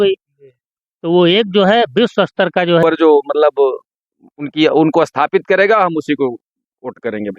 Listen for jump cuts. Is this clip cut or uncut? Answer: cut